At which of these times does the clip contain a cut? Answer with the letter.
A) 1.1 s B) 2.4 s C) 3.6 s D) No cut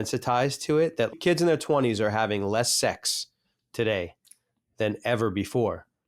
A